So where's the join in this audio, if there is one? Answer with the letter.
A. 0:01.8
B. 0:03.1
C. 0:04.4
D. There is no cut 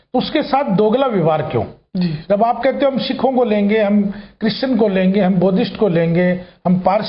D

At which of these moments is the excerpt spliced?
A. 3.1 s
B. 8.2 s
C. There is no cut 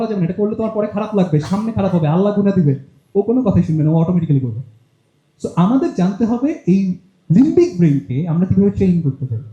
C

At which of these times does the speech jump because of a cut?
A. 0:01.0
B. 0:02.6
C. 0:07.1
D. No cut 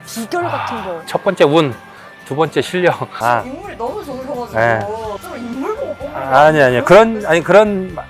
A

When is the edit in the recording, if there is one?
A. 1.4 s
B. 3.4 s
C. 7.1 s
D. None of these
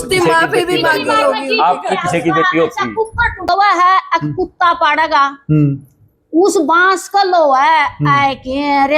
B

